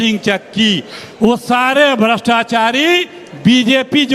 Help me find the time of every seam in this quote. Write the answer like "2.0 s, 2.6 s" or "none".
none